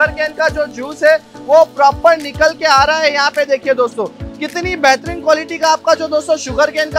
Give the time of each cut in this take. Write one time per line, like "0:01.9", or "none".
none